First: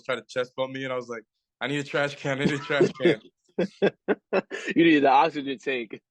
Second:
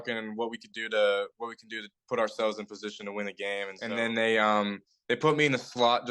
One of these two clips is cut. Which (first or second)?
second